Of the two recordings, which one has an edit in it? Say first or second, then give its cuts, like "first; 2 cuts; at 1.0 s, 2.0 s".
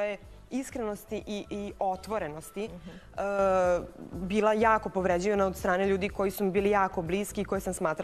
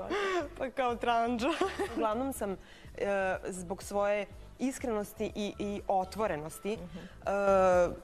second; 1 cut; at 2.0 s